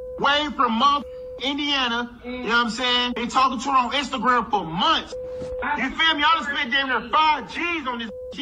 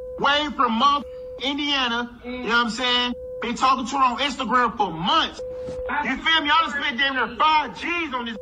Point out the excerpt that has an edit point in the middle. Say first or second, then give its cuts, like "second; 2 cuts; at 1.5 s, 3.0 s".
first; 1 cut; at 3.2 s